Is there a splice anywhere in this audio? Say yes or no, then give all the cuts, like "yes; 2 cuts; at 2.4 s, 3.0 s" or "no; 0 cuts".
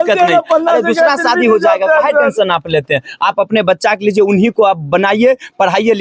no; 0 cuts